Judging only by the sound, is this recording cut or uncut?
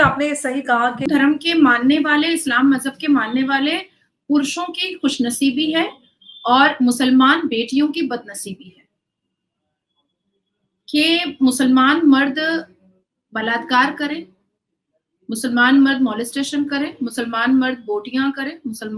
cut